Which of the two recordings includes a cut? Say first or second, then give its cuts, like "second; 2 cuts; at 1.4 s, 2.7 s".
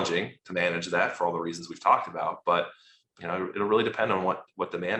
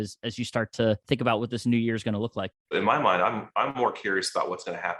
second; 2 cuts; at 1.0 s, 2.7 s